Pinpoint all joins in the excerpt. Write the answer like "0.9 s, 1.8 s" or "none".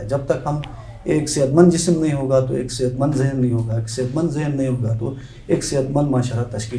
none